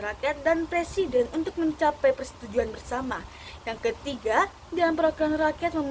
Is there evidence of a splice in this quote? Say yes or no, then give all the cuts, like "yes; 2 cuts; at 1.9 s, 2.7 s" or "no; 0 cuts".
no; 0 cuts